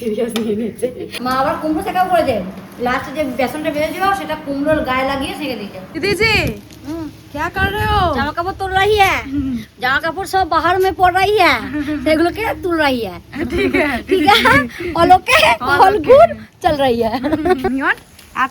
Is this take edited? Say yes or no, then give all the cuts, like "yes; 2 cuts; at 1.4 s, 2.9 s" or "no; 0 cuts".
yes; 3 cuts; at 1.2 s, 5.8 s, 17.7 s